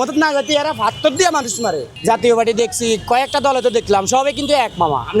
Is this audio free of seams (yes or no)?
no